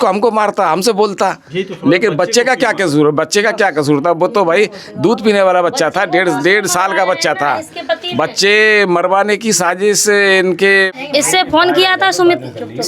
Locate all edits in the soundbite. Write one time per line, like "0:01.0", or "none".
0:10.9